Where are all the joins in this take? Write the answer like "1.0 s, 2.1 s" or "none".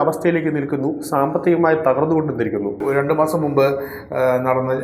2.8 s